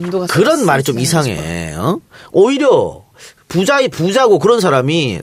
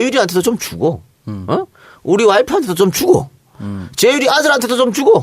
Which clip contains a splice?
second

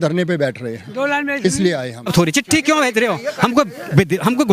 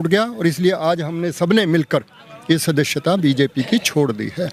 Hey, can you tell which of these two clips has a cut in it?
first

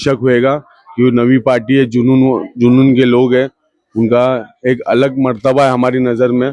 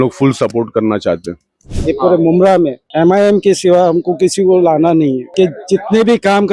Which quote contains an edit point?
second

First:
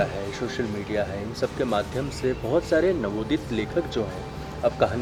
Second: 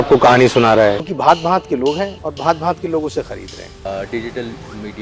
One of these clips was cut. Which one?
second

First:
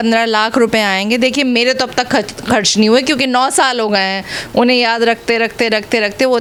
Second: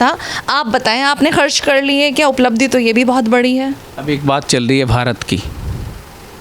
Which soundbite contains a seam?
second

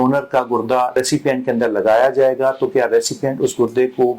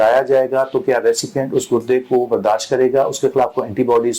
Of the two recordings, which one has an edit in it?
first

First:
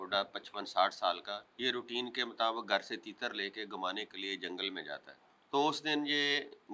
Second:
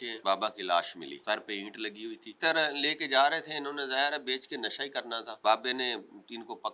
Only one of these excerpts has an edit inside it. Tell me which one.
second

